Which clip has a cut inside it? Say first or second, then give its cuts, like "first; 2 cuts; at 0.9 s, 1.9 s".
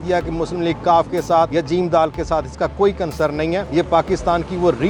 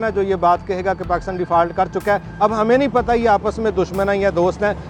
first; 2 cuts; at 1.5 s, 3.7 s